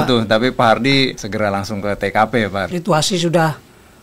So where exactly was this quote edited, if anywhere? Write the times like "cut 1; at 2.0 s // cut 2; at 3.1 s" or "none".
cut 1; at 1.2 s // cut 2; at 2.7 s

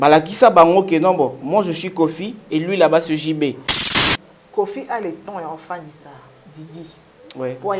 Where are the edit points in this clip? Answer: cut 1; at 3.9 s

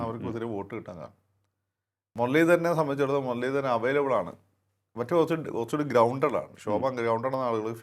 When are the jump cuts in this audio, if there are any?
none

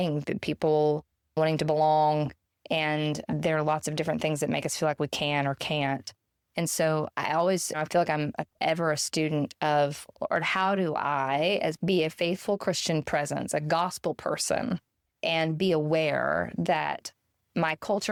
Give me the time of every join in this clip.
none

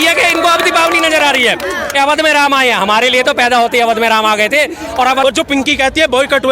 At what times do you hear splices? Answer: cut 1; at 5.2 s

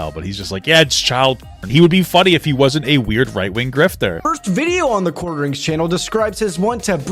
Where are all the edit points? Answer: cut 1; at 1.7 s // cut 2; at 4.2 s

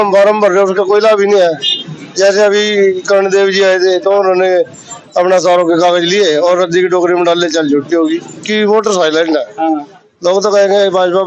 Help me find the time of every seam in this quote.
cut 1; at 8.5 s

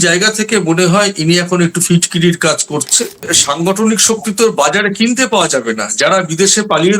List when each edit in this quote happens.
cut 1; at 3.3 s

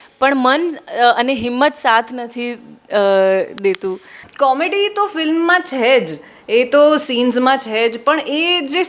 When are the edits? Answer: cut 1; at 4.2 s

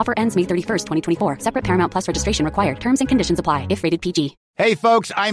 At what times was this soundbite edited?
cut 1; at 4.4 s

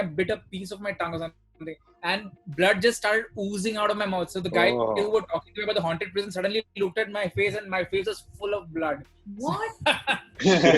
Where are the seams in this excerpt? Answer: none

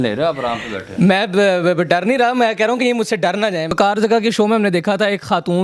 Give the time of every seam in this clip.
cut 1; at 3.8 s

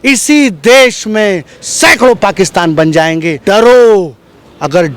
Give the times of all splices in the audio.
cut 1; at 3.3 s

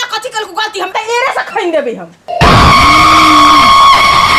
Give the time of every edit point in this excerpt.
cut 1; at 2.3 s

